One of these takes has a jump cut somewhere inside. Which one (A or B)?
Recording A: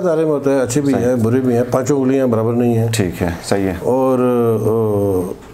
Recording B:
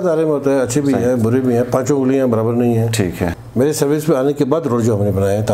B